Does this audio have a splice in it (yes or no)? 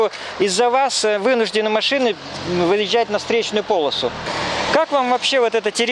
yes